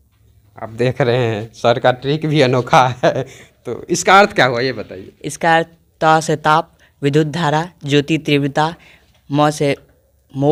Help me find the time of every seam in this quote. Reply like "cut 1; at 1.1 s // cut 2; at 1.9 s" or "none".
none